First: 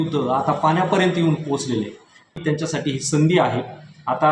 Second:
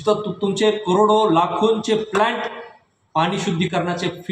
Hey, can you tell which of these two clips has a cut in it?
first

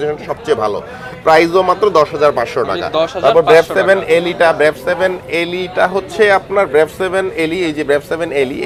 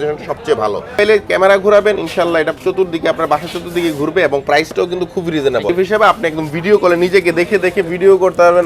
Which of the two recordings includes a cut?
second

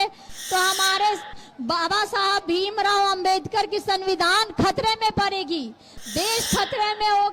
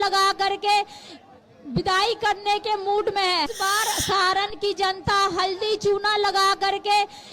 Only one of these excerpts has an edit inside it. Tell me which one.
second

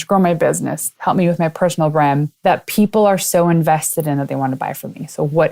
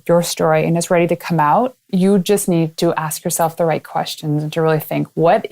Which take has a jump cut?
second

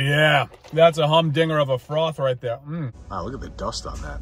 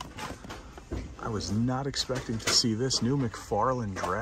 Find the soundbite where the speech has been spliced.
first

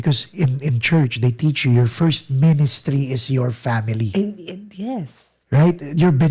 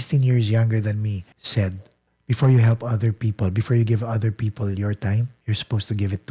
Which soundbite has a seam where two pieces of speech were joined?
second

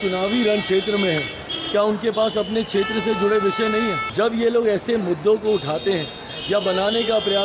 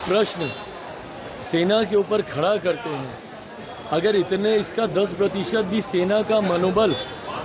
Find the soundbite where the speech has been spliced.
first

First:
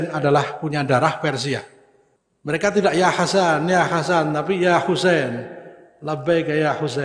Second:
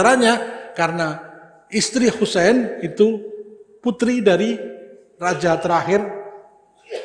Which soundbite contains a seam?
first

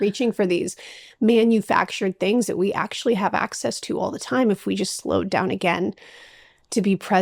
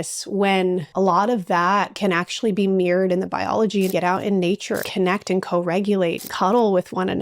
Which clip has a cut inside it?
second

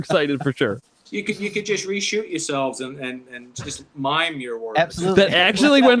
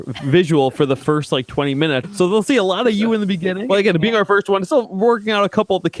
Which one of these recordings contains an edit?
second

